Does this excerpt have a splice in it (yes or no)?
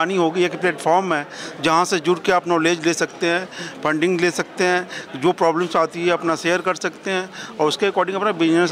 no